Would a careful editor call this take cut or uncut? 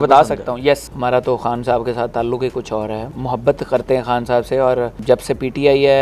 cut